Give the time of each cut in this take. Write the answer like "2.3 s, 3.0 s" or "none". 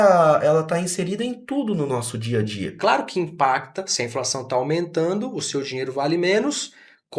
2.8 s